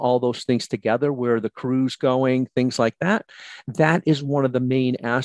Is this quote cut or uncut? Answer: uncut